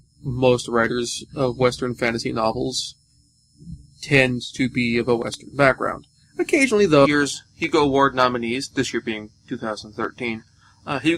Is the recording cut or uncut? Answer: uncut